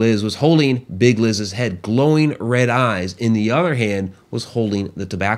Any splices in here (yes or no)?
no